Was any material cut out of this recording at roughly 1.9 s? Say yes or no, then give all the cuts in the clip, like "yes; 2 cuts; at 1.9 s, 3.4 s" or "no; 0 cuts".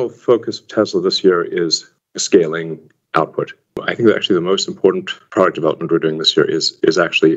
no; 1 cut; at 3.6 s